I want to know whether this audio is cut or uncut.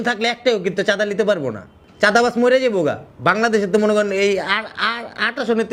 uncut